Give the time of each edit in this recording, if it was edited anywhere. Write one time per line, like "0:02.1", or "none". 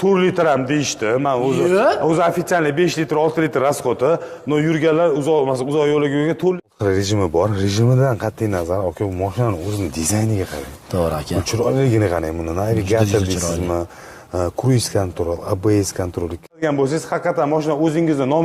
0:06.6
0:16.6